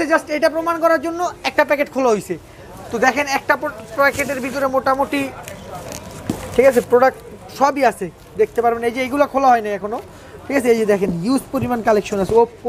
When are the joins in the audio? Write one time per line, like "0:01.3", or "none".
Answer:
none

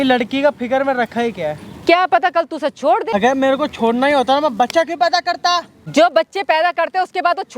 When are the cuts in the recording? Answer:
0:03.1
0:05.7

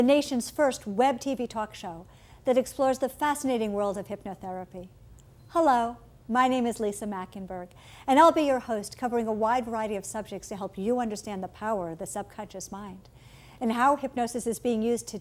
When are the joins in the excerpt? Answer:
0:09.6

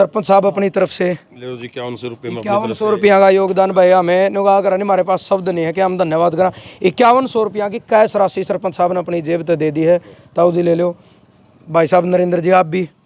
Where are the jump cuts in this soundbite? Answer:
none

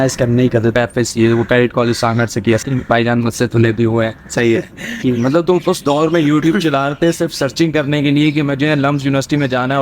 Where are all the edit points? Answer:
0:00.7
0:02.6
0:05.0

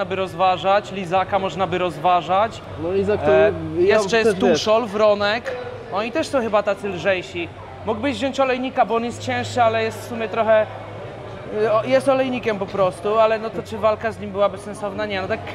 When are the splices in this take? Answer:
none

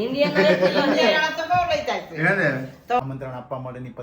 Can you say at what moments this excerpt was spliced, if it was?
0:03.0

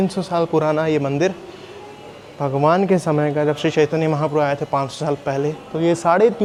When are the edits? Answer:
none

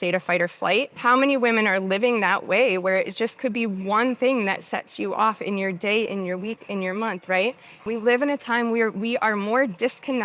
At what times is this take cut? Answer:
0:00.9
0:07.9

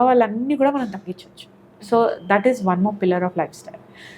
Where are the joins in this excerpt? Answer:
none

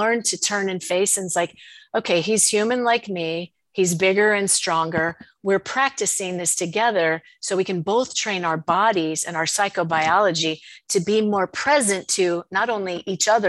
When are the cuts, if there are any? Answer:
none

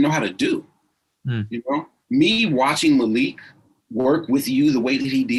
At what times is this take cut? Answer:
none

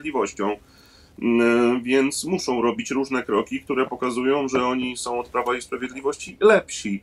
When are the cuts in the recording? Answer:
none

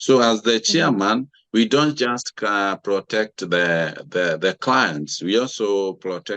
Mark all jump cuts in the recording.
none

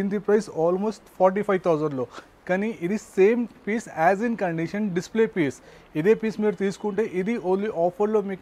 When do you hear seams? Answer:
none

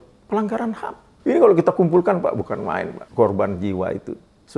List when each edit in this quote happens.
0:01.1
0:03.0

